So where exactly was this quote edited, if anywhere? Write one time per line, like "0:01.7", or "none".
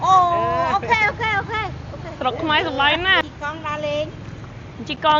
0:03.2